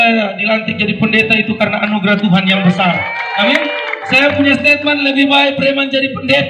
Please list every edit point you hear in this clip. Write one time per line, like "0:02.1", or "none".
none

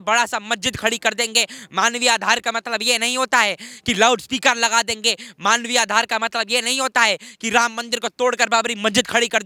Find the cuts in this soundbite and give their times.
none

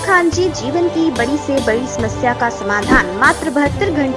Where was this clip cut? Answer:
none

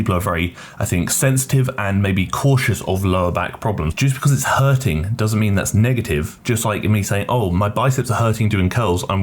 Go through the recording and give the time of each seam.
0:03.9

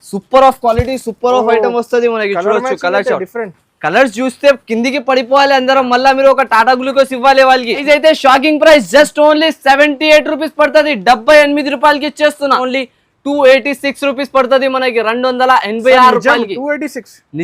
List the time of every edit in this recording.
0:07.8
0:12.6

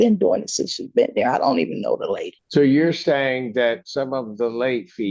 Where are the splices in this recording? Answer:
0:02.3

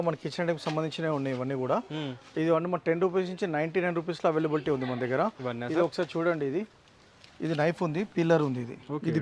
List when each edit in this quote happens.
none

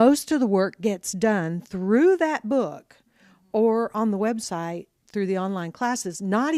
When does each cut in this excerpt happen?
0:02.5

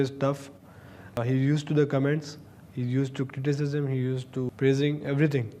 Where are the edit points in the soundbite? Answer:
0:01.2
0:04.5

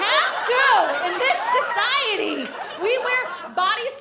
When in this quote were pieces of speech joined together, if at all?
0:02.7

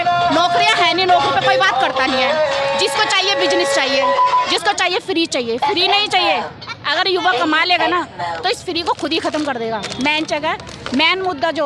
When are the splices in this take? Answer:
none

